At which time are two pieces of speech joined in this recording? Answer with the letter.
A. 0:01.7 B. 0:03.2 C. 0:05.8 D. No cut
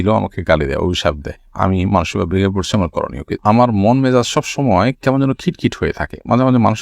B